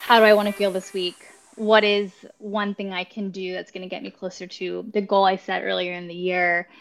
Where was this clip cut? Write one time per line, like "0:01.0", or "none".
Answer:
none